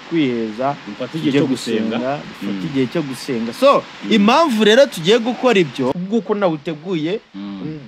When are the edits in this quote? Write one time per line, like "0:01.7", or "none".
0:05.9